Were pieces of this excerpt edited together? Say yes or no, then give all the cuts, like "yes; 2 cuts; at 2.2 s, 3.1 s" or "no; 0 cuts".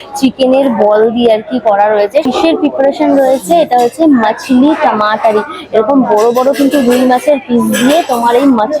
yes; 1 cut; at 2.3 s